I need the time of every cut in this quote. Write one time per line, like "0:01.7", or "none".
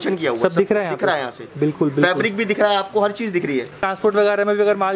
0:03.8